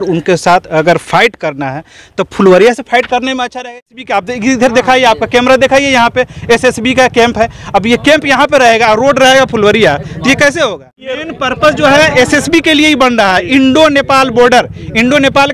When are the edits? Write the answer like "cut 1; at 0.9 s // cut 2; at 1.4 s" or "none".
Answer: cut 1; at 3.7 s // cut 2; at 11.2 s